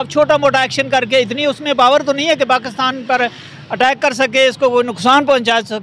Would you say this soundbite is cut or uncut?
uncut